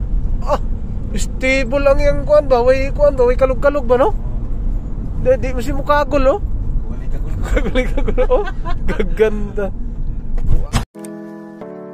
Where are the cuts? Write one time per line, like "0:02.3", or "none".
0:10.7